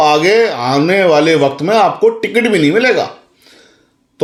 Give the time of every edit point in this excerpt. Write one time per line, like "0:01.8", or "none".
none